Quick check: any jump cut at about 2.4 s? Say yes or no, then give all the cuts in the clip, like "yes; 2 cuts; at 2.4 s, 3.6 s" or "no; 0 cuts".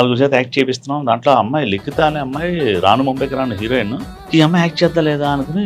no; 1 cut; at 4.2 s